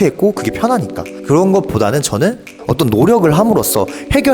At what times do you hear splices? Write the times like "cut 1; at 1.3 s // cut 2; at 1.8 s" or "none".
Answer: cut 1; at 2.6 s